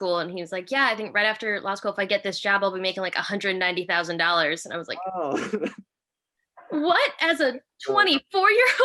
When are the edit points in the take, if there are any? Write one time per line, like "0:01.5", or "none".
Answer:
none